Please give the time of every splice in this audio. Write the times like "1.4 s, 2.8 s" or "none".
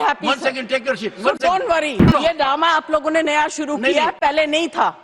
2.1 s